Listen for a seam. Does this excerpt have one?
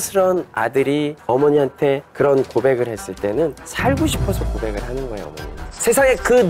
no; 0 cuts

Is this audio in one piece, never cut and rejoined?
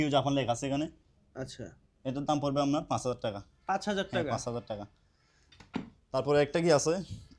yes; 0 cuts

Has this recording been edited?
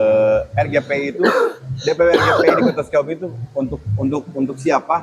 no; 0 cuts

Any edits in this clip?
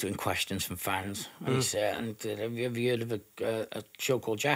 no; 0 cuts

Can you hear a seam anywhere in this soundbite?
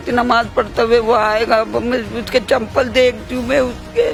no; 0 cuts

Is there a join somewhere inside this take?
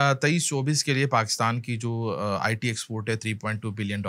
no; 0 cuts

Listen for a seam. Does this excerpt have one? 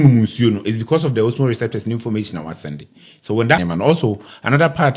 yes; 1 cut; at 3.6 s

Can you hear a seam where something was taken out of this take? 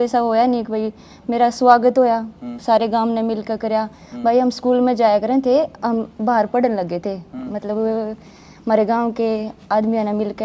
no; 0 cuts

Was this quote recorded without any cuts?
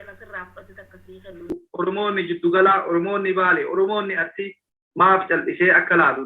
no; 1 cut; at 1.7 s

